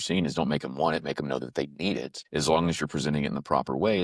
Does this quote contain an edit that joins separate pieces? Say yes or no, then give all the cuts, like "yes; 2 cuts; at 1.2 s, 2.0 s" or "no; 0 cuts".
yes; 1 cut; at 2.2 s